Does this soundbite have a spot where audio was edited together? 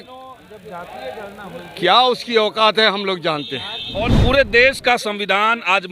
yes; 1 cut; at 4.2 s

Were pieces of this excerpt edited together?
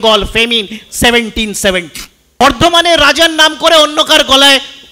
yes; 1 cut; at 2.4 s

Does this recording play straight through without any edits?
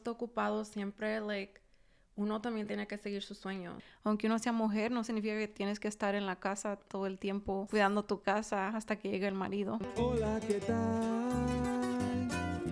no; 3 cuts; at 3.8 s, 7.6 s, 9.9 s

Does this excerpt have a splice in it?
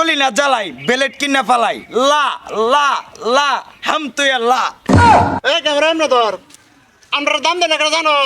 yes; 2 cuts; at 4.8 s, 5.4 s

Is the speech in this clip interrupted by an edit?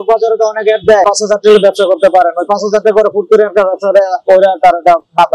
no; 0 cuts

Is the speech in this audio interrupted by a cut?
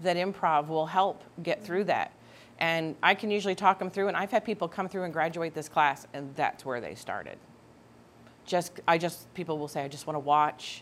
no; 0 cuts

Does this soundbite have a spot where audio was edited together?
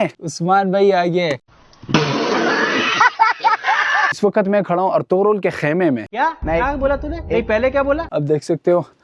yes; 1 cut; at 4.2 s

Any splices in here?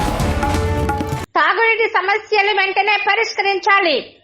yes; 1 cut; at 1.2 s

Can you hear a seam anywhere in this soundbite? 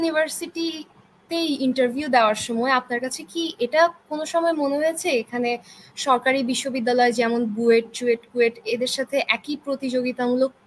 no; 0 cuts

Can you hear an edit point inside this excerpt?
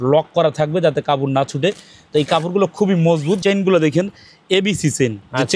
yes; 1 cut; at 3.4 s

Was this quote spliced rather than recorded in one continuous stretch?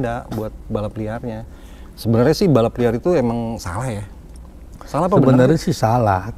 no; 0 cuts

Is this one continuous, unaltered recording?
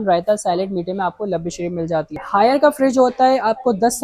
no; 1 cut; at 2.2 s

